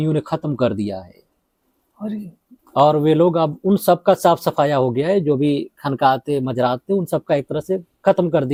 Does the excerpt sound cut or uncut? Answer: uncut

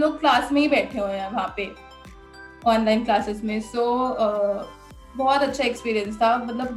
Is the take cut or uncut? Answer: uncut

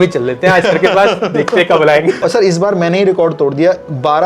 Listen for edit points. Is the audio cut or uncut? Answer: cut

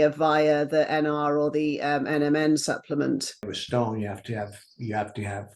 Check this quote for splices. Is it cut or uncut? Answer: cut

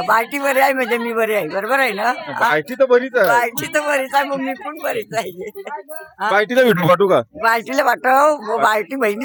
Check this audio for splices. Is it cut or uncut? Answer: uncut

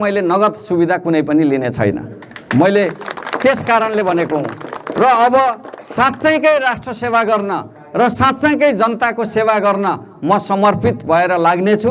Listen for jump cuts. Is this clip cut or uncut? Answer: uncut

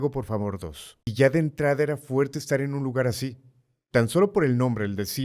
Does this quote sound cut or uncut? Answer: cut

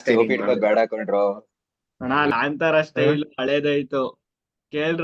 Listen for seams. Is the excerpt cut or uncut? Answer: cut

